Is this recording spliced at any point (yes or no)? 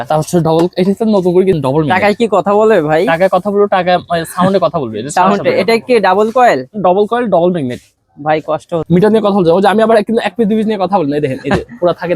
yes